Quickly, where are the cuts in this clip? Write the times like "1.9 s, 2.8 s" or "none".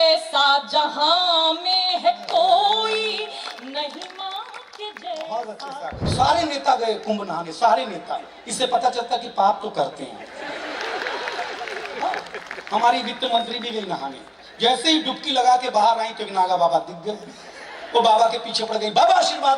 6.1 s